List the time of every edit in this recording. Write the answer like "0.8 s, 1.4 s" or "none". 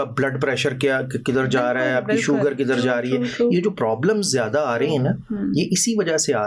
none